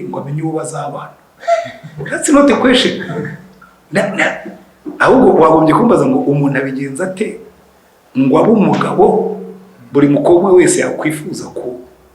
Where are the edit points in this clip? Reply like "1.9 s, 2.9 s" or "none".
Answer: none